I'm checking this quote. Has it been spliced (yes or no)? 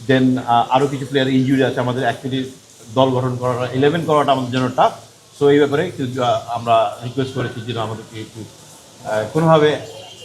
no